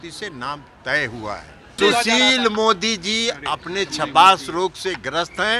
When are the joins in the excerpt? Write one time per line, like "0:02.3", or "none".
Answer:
0:01.8